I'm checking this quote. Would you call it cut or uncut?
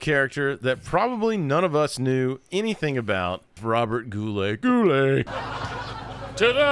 cut